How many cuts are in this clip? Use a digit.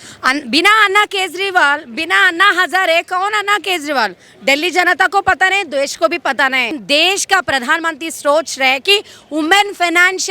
1